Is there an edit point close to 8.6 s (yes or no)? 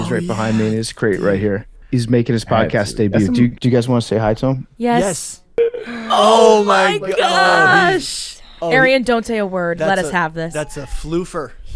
no